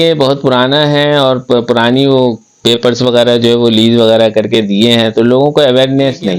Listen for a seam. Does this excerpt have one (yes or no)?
no